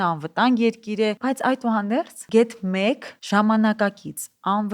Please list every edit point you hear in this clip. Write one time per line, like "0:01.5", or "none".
0:01.2
0:02.2
0:03.1